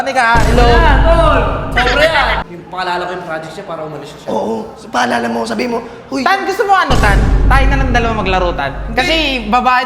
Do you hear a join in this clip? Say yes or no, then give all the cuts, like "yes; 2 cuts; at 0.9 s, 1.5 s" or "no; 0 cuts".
yes; 1 cut; at 2.4 s